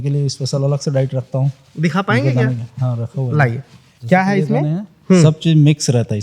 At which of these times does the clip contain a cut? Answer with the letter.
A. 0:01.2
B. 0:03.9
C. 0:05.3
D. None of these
D